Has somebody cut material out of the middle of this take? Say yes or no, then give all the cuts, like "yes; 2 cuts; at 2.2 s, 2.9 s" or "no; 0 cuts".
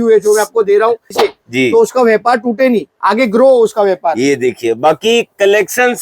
yes; 1 cut; at 1.1 s